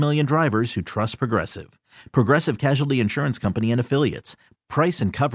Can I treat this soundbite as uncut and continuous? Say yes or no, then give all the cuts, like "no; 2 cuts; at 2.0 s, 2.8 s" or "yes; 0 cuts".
yes; 0 cuts